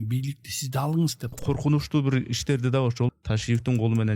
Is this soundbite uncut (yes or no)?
no